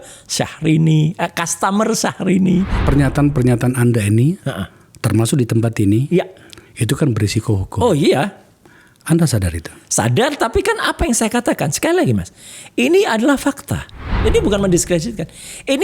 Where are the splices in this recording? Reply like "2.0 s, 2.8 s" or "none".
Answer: 2.8 s, 14.1 s